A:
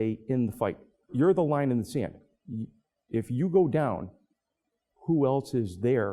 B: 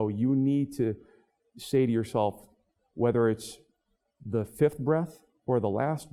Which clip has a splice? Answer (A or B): A